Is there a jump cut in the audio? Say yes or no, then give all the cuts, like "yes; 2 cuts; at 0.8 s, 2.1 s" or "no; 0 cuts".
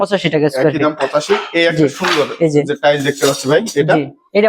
no; 0 cuts